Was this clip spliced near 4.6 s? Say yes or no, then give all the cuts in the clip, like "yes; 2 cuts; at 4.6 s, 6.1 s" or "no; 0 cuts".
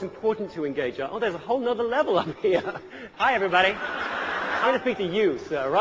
yes; 2 cuts; at 3.0 s, 4.6 s